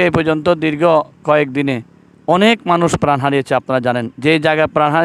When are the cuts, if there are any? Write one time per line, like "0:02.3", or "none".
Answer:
none